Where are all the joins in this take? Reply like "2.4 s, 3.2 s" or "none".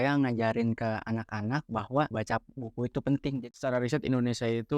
2.1 s, 3.4 s